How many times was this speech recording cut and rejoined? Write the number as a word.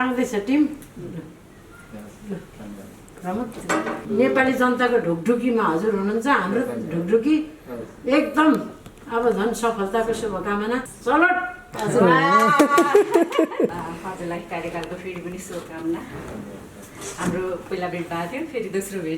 three